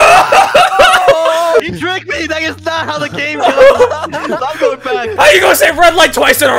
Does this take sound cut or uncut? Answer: uncut